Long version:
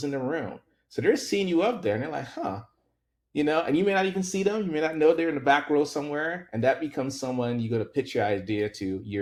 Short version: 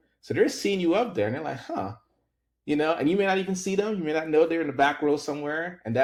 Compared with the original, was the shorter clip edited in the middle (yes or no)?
no